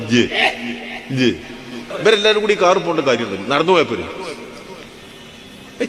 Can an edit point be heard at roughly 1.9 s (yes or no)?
yes